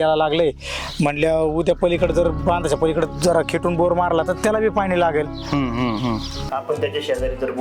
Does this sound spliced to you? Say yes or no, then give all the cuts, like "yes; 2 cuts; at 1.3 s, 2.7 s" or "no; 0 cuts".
yes; 1 cut; at 6.4 s